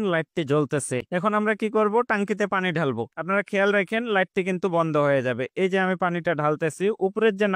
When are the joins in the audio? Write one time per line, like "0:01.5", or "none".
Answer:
0:01.0